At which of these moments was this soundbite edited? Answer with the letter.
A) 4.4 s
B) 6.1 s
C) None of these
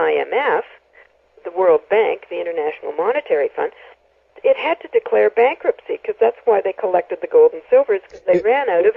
B